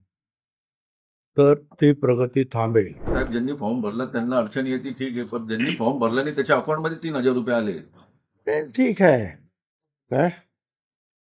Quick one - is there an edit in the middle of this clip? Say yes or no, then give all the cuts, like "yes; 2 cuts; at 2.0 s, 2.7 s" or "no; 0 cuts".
yes; 1 cut; at 3.1 s